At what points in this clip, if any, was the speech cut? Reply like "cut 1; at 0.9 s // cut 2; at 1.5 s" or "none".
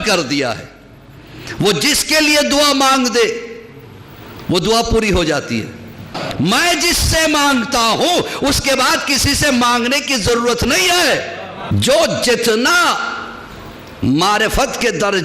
cut 1; at 6.1 s // cut 2; at 11.5 s